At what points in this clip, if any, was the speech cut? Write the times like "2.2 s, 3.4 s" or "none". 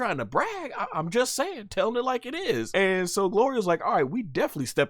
2.7 s